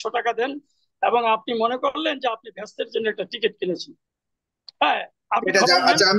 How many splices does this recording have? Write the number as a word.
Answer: zero